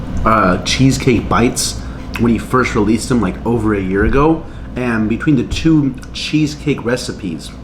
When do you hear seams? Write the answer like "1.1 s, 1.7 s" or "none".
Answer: none

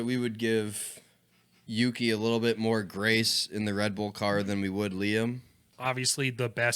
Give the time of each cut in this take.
5.7 s

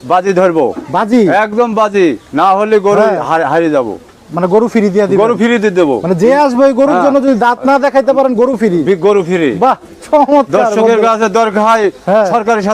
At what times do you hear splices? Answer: none

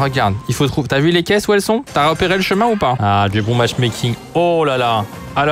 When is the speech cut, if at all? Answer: 3.0 s

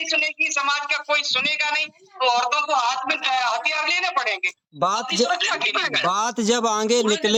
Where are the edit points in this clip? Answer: none

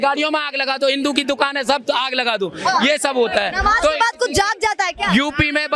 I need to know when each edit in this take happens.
none

